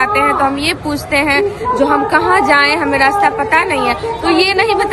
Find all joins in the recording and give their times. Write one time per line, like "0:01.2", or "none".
none